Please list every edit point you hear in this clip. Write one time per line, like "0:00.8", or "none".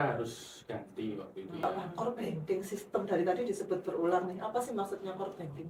0:01.6